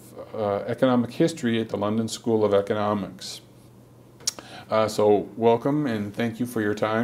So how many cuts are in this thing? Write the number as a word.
zero